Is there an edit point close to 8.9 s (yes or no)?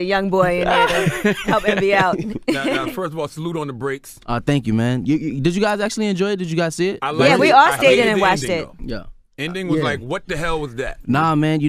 no